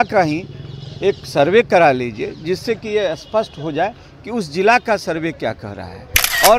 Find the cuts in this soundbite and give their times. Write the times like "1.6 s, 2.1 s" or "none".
none